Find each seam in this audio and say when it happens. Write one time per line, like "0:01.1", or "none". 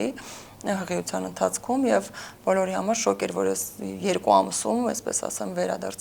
none